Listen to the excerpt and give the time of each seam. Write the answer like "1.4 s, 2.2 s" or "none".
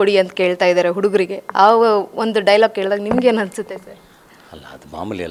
none